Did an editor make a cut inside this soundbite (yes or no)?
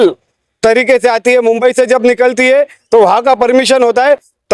no